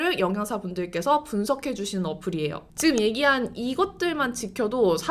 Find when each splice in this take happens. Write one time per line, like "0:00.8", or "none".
0:02.6